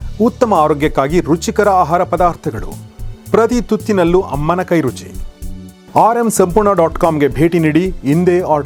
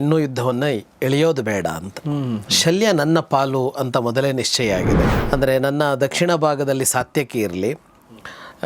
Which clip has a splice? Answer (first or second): second